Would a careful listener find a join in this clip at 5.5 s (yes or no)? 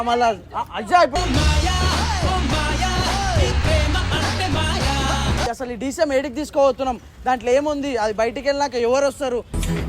yes